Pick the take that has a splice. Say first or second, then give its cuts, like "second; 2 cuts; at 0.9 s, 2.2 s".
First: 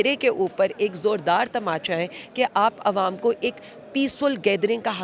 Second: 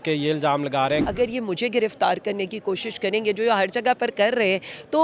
second; 1 cut; at 1.0 s